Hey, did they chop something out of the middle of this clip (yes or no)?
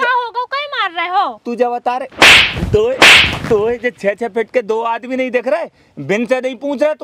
no